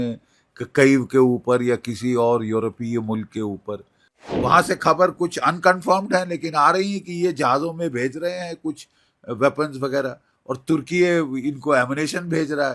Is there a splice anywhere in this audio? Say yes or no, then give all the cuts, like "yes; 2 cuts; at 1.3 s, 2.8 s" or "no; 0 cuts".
yes; 1 cut; at 4.4 s